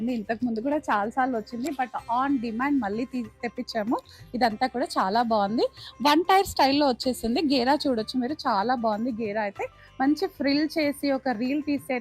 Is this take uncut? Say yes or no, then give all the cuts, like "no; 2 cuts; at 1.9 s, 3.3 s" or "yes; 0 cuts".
yes; 0 cuts